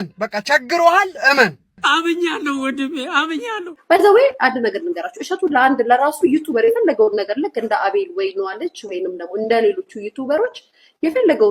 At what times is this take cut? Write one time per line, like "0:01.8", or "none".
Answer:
0:03.7